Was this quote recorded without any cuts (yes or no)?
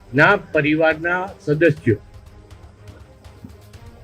yes